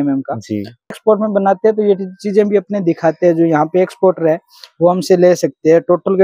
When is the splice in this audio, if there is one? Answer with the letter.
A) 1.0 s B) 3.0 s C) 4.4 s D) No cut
A